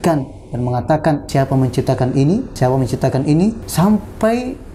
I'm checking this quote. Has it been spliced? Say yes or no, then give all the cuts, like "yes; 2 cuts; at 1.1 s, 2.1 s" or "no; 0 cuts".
yes; 3 cuts; at 1.3 s, 2.5 s, 3.6 s